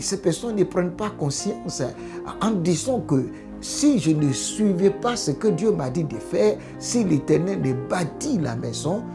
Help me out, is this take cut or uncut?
uncut